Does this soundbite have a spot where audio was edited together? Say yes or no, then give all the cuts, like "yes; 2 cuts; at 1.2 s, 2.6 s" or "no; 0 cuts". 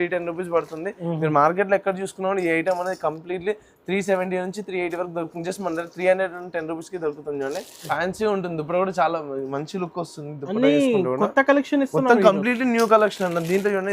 yes; 1 cut; at 7.7 s